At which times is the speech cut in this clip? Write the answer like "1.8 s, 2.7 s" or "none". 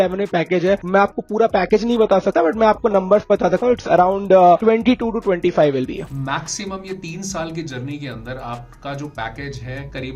6.0 s